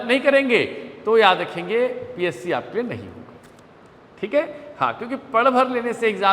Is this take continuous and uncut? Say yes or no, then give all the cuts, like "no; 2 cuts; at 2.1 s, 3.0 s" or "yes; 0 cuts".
yes; 0 cuts